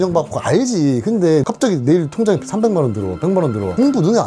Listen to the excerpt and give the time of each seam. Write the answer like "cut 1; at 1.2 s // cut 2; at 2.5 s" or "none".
cut 1; at 1.4 s